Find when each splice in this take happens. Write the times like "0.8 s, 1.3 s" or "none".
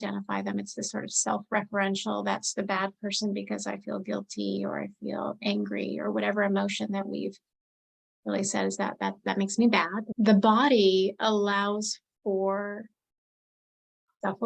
10.0 s